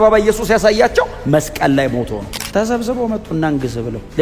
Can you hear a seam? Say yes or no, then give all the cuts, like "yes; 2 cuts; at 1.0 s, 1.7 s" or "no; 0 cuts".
yes; 1 cut; at 2.2 s